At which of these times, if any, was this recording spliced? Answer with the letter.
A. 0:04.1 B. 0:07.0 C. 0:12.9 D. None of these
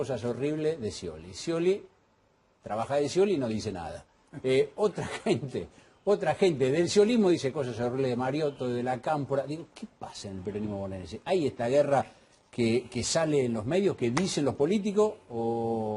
A